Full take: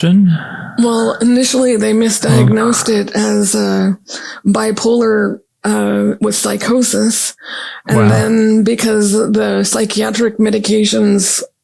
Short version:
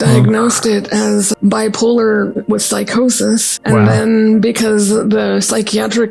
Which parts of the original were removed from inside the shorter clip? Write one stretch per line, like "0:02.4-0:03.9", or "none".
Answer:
0:03.5-0:04.3
0:05.4-0:06.1
0:07.3-0:07.8